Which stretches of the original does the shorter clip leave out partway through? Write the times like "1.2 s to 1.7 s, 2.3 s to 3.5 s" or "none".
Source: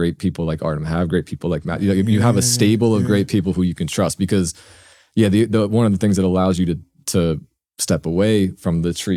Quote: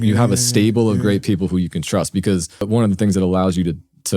4.7 s to 5.7 s